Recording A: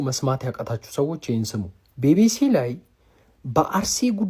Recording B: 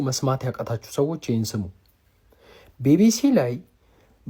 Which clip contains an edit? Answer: A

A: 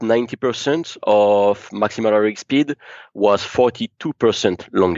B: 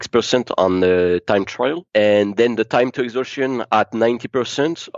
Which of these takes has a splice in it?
B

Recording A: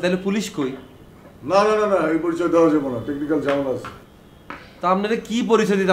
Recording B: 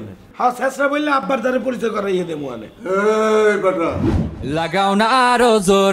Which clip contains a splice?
B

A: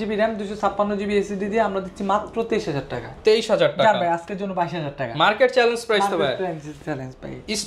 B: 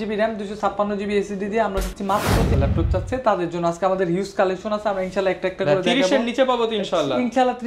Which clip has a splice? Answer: B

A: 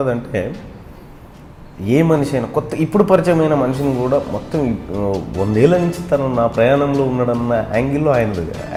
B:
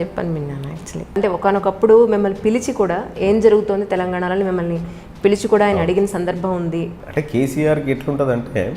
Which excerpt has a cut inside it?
B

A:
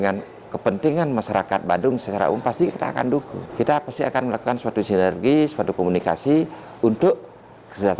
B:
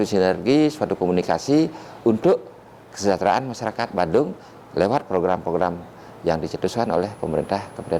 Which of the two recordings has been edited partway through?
A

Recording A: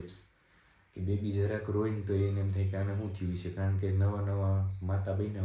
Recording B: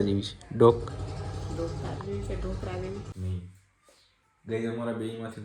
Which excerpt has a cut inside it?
B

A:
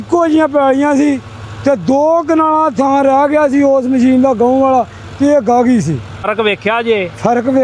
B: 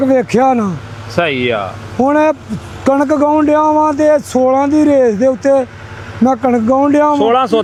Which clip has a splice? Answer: A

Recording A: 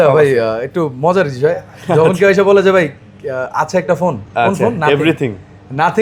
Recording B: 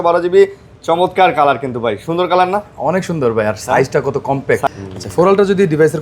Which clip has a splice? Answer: B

